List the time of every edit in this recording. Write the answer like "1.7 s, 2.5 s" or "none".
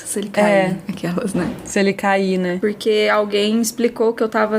2.6 s